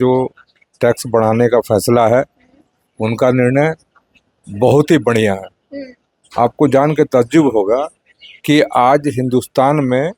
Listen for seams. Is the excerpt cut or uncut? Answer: uncut